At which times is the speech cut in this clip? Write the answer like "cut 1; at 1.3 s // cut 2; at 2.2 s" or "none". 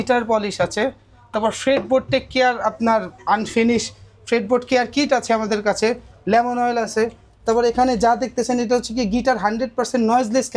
none